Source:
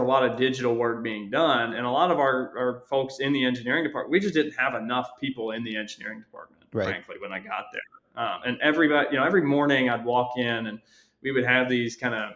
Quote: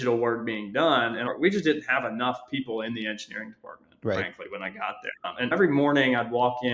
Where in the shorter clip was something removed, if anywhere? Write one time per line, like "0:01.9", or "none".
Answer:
0:01.2
0:05.5